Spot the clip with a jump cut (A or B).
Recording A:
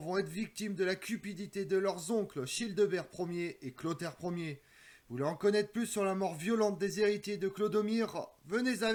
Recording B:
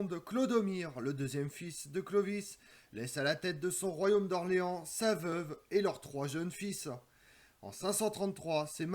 B